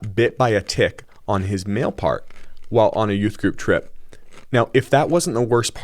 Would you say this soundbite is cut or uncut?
uncut